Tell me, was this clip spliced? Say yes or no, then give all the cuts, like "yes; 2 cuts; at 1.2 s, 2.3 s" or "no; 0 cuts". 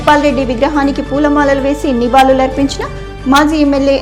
no; 0 cuts